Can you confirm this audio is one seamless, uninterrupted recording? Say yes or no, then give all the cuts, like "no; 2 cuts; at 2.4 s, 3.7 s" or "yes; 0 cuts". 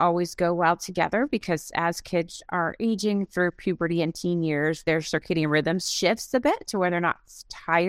yes; 0 cuts